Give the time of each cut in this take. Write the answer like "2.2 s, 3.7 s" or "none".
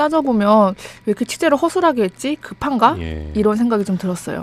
2.9 s